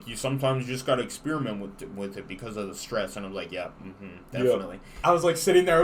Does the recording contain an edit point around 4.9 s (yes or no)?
yes